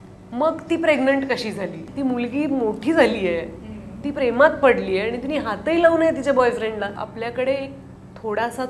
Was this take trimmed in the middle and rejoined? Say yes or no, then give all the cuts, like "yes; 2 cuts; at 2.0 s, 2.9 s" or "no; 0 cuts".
yes; 2 cuts; at 1.8 s, 6.9 s